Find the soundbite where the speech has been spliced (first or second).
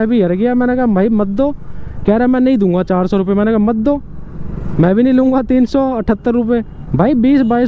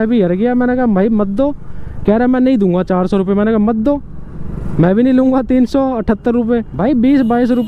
second